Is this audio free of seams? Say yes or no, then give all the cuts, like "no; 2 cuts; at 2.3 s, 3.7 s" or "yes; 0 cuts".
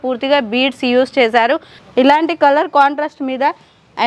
no; 1 cut; at 1.8 s